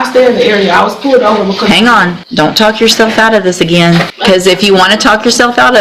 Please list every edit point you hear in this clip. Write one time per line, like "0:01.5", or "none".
0:02.2
0:04.1